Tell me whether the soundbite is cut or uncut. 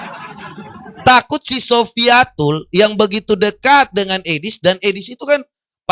uncut